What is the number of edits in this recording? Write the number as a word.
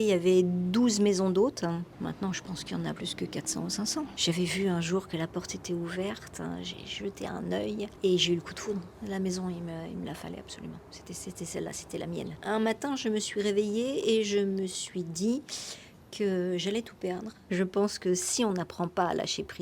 six